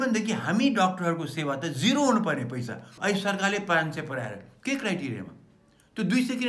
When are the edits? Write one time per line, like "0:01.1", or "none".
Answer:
0:02.9